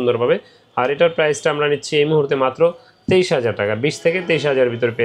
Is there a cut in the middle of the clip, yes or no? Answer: no